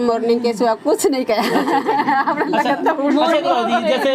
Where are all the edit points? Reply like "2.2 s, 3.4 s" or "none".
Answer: none